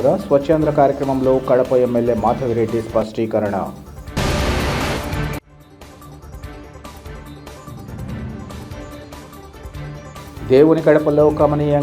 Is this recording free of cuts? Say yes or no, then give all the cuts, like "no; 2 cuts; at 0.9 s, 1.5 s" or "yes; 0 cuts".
yes; 0 cuts